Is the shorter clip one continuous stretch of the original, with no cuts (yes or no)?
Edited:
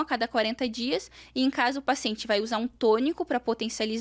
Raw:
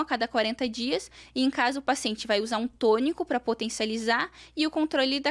yes